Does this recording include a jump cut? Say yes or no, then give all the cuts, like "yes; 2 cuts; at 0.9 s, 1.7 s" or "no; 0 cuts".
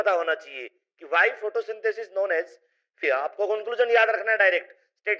yes; 1 cut; at 3.0 s